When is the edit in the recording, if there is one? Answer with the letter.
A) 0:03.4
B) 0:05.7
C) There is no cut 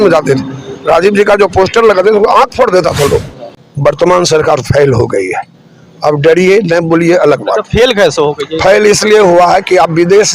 A